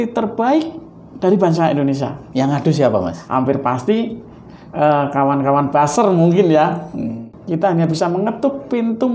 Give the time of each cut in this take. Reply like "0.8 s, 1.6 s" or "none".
3.2 s, 7.1 s